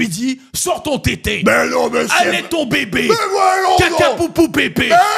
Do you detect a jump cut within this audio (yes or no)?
no